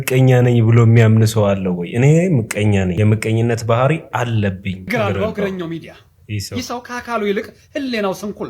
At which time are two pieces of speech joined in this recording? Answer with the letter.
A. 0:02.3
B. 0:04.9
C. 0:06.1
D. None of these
B